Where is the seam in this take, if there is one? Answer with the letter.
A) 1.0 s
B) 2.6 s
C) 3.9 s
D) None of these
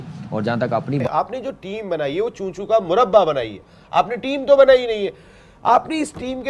A